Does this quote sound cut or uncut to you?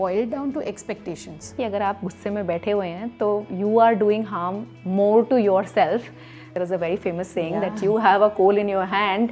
cut